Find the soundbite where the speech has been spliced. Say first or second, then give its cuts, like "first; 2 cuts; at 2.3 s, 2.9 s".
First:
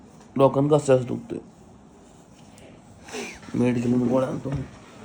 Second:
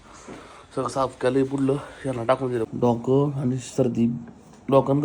second; 1 cut; at 2.7 s